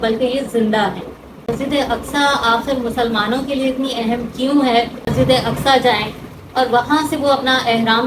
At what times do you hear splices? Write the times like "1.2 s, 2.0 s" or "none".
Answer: 1.5 s, 5.1 s